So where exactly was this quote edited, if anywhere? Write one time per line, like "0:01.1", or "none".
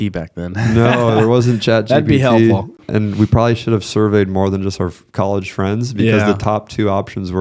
0:02.8